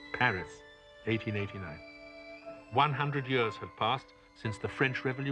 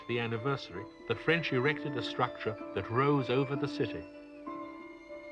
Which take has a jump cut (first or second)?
second